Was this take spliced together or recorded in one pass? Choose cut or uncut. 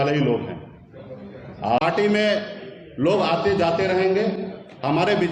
cut